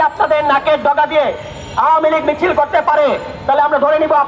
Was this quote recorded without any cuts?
yes; 0 cuts

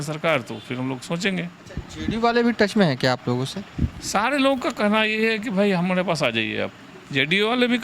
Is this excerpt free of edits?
no; 1 cut; at 1.6 s

